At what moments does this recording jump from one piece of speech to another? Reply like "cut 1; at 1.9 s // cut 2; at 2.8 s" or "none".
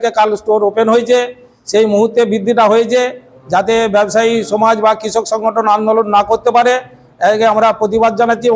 none